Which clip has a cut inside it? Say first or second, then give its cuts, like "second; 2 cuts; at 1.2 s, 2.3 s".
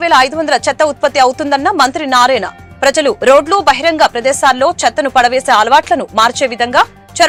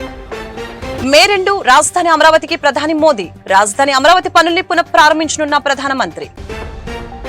second; 1 cut; at 1.0 s